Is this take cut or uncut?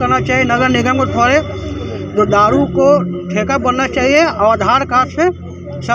uncut